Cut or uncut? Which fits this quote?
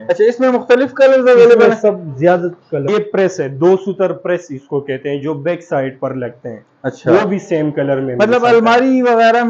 cut